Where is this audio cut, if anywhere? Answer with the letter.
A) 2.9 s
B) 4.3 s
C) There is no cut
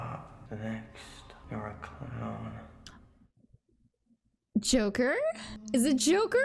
B